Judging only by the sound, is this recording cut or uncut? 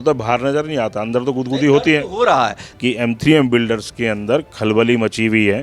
cut